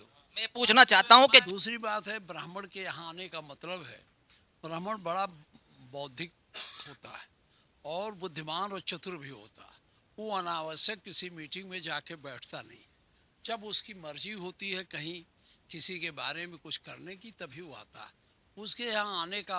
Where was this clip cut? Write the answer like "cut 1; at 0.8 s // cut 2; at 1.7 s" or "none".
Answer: cut 1; at 1.5 s